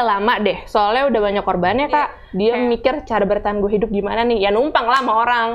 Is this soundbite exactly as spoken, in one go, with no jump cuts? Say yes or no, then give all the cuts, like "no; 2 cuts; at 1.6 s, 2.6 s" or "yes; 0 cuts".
no; 1 cut; at 2.2 s